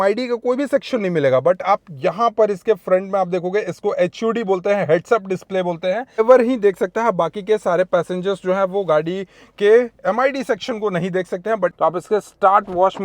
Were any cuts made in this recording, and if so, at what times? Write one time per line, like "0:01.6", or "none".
0:06.2
0:11.7

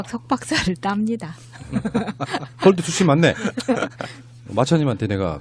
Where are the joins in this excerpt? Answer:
0:02.8

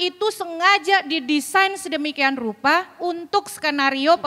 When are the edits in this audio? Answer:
none

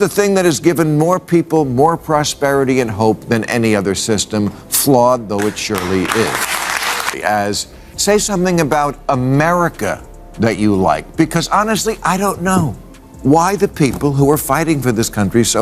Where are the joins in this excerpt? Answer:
0:06.8

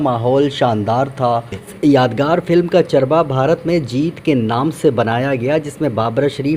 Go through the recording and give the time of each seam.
0:01.7

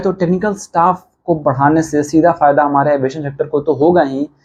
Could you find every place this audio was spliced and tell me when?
none

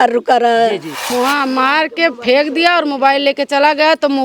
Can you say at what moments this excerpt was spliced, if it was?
0:01.1

